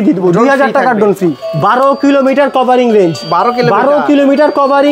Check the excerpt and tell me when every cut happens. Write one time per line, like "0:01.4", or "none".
0:01.4